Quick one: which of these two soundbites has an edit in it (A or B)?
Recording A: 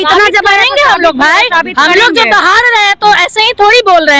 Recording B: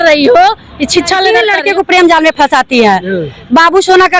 B